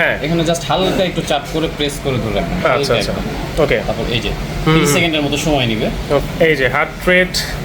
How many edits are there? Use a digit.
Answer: 1